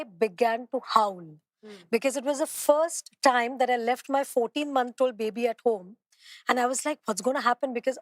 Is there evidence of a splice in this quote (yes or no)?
no